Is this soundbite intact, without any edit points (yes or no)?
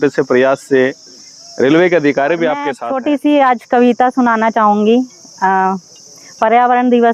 no